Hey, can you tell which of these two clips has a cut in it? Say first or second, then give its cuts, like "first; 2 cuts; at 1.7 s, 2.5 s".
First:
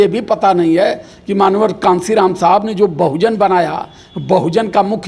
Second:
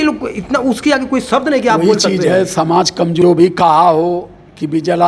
second; 1 cut; at 3.2 s